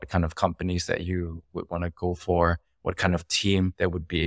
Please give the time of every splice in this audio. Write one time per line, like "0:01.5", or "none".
none